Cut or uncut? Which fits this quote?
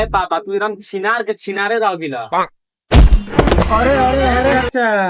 cut